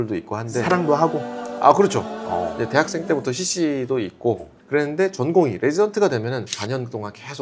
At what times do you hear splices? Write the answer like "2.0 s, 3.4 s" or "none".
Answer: 4.5 s, 6.5 s